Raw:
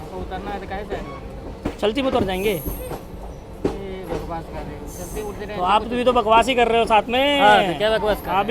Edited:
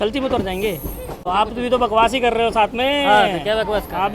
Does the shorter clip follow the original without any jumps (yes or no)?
no